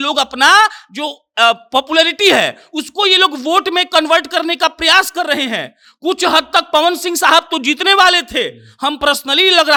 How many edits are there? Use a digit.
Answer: 0